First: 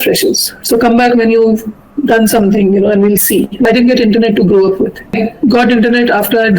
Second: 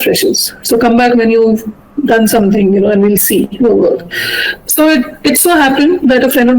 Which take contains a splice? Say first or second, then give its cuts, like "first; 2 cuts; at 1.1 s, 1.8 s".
first; 2 cuts; at 3.7 s, 5.2 s